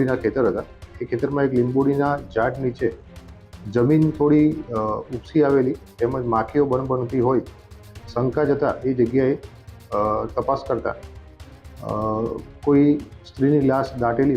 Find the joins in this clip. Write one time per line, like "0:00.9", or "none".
none